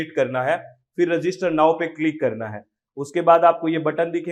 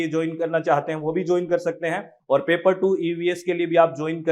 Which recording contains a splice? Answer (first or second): second